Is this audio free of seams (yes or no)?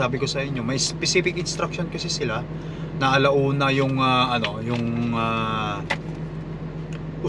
yes